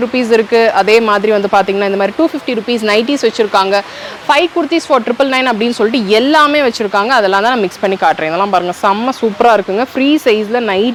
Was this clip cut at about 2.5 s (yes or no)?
no